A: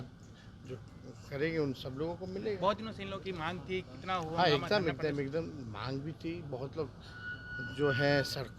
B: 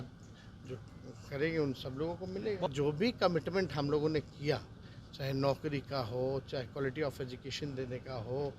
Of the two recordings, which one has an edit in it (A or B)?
B